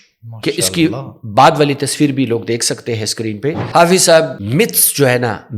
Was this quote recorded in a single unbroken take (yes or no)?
no